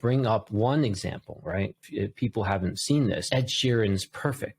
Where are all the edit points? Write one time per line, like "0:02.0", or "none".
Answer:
0:01.8
0:03.2